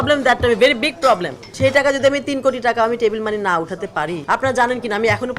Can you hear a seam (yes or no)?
yes